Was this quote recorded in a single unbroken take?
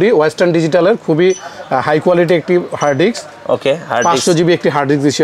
yes; 0 cuts

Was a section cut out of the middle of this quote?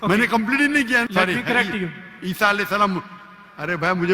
yes; 1 cut; at 1.1 s

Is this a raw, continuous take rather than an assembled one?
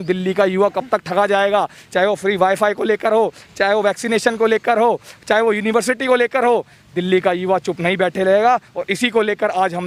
yes; 0 cuts

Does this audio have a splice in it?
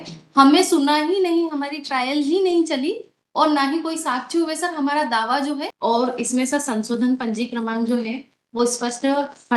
yes; 1 cut; at 5.7 s

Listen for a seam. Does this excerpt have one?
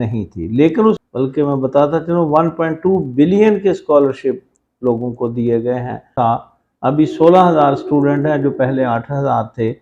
yes; 2 cuts; at 1.0 s, 6.1 s

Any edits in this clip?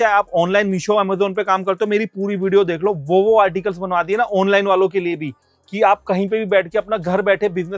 no; 0 cuts

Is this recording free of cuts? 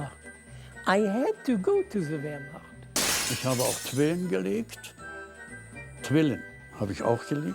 no; 1 cut; at 2.9 s

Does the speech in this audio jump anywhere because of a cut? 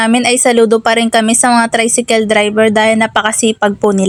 no; 0 cuts

